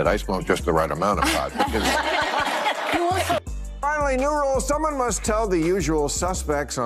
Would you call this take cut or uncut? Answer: cut